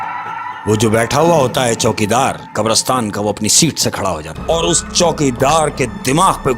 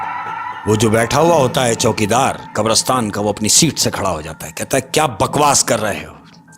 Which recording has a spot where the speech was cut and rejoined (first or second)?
first